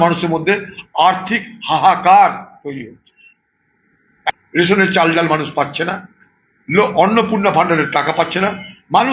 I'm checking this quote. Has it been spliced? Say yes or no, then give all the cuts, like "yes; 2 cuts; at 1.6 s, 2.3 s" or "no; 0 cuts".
yes; 1 cut; at 4.3 s